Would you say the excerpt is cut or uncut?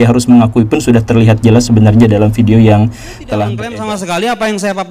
cut